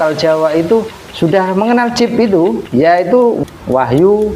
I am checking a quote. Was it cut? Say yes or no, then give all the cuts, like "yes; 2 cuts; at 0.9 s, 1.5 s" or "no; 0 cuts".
yes; 3 cuts; at 1.0 s, 2.6 s, 3.4 s